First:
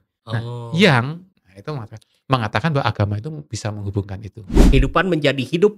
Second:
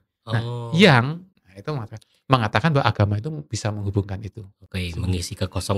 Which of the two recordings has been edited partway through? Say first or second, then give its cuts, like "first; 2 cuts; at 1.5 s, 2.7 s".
first; 1 cut; at 4.6 s